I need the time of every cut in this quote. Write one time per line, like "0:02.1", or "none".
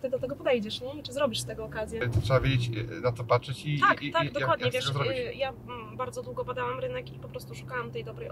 0:02.0

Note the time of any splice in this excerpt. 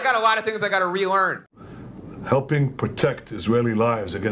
0:01.5

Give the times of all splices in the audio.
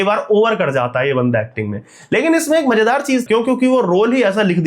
0:03.2

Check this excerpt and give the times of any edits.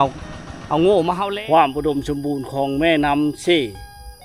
0:01.2

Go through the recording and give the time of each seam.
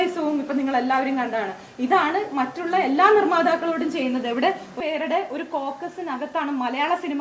0:04.8

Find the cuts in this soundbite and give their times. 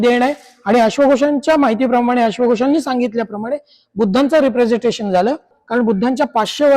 0:05.5

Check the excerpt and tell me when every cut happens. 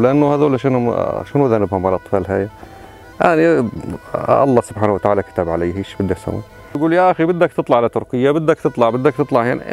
0:06.8

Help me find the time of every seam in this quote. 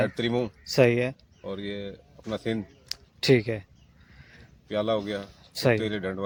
none

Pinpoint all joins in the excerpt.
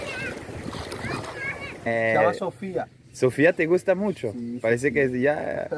0:01.9

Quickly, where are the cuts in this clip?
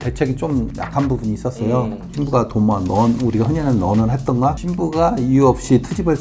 0:02.1

